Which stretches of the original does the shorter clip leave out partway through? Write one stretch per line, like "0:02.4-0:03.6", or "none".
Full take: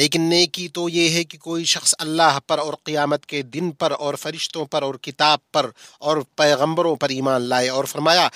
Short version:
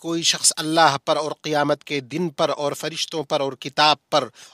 none